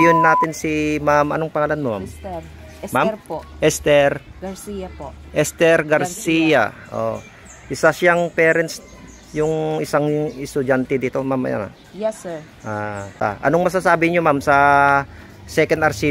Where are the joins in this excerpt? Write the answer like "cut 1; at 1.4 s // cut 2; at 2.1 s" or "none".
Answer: cut 1; at 13.2 s